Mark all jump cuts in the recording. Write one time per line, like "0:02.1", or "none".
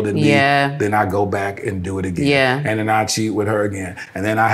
none